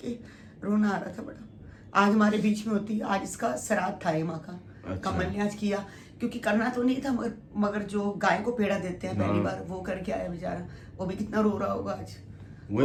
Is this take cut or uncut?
uncut